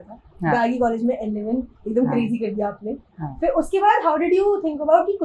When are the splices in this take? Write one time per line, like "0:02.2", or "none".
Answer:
none